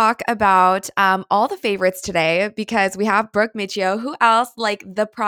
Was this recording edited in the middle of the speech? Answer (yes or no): no